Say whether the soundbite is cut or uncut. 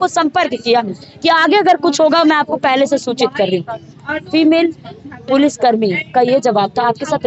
uncut